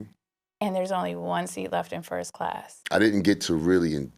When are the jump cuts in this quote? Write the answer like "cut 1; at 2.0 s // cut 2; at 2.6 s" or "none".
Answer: cut 1; at 2.7 s